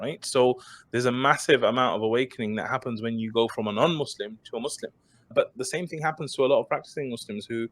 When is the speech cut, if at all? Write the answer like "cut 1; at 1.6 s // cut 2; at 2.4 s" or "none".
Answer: cut 1; at 5.3 s